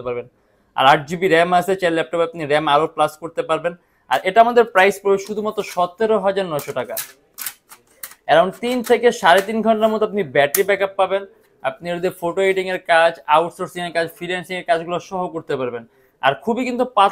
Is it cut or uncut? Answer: uncut